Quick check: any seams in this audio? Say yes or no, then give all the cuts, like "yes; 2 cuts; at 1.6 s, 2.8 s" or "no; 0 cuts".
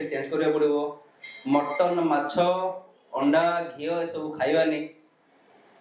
no; 0 cuts